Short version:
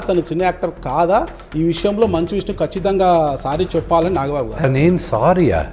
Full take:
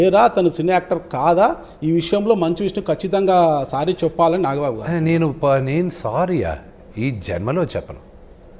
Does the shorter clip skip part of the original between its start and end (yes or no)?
yes